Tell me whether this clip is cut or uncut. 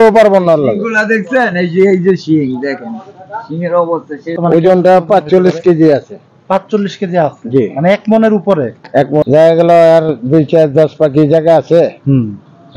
cut